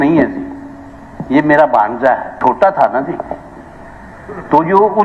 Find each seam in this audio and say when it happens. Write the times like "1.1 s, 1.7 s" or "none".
2.4 s